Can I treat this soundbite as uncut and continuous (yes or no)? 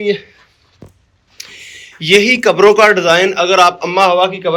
yes